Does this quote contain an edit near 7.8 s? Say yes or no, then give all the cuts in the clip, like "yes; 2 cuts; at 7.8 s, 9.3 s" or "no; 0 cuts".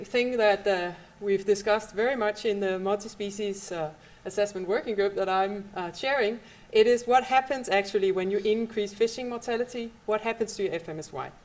no; 1 cut; at 4.9 s